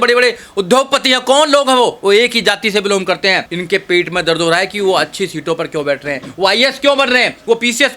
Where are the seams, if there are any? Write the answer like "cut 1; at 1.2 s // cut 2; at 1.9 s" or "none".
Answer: cut 1; at 3.5 s